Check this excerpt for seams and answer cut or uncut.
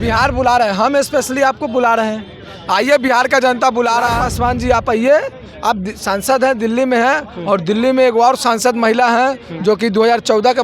cut